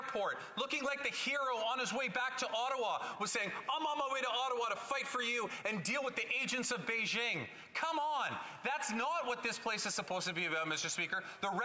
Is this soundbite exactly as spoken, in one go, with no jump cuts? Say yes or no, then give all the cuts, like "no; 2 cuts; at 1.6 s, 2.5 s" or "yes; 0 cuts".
yes; 0 cuts